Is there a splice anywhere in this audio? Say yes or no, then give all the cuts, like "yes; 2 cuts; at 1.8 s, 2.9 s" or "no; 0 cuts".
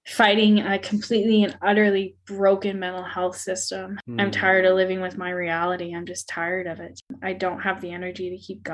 yes; 2 cuts; at 4.0 s, 7.1 s